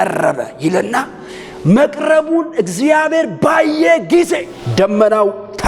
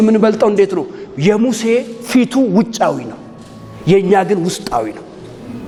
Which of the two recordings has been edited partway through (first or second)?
first